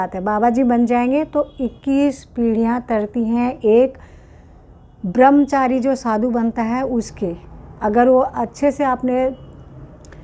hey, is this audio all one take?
yes; 0 cuts

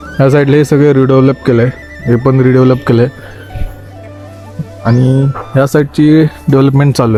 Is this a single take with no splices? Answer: yes; 0 cuts

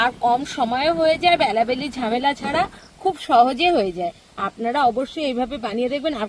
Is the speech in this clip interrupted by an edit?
no; 0 cuts

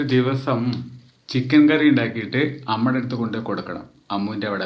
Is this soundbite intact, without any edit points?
yes; 0 cuts

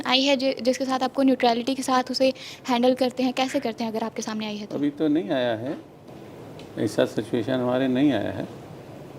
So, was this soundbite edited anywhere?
no; 0 cuts

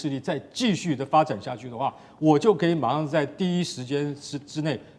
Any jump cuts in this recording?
no; 0 cuts

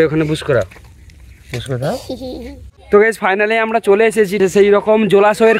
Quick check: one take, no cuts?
no; 1 cut; at 2.8 s

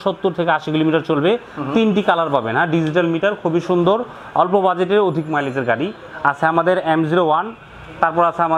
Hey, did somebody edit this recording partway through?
no; 0 cuts

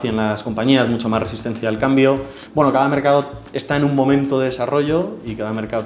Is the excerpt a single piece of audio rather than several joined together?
no; 1 cut; at 2.4 s

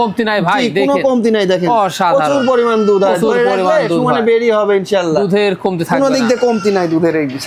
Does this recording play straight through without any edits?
yes; 0 cuts

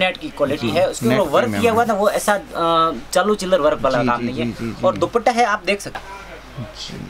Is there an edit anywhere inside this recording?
yes; 1 cut; at 6.0 s

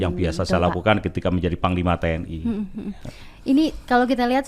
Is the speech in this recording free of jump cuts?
yes; 0 cuts

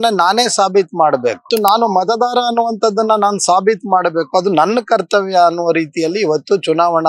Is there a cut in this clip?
yes; 1 cut; at 1.5 s

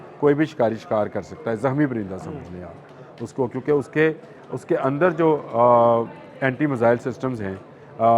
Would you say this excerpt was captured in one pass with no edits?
yes; 0 cuts

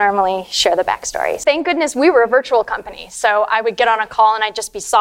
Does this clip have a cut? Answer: yes; 1 cut; at 1.4 s

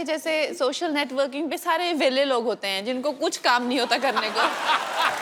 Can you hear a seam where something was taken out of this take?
no; 0 cuts

